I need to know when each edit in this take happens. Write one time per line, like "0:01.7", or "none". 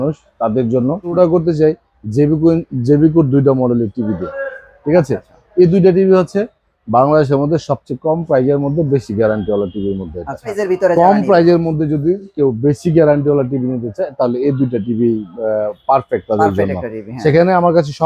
0:01.1
0:10.6